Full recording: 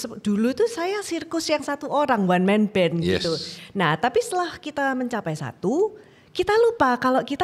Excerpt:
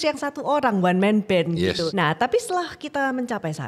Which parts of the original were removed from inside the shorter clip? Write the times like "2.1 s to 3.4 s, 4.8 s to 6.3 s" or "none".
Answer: 3.4 s to 3.7 s